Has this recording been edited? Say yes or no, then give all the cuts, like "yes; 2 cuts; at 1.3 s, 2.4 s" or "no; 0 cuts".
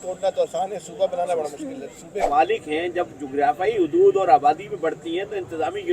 yes; 1 cut; at 2.1 s